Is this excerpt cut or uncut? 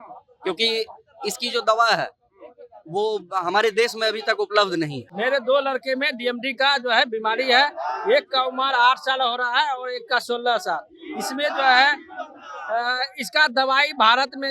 cut